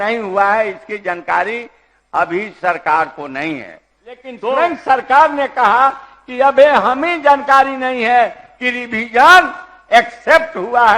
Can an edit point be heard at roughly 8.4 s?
no; 1 cut; at 4.3 s

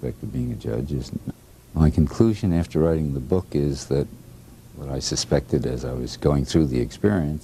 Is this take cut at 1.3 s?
no; 0 cuts

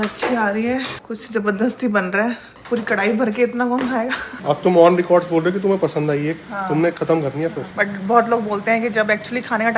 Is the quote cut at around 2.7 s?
no; 2 cuts; at 4.3 s, 7.6 s

